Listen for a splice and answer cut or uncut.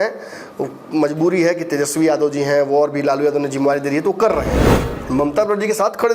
cut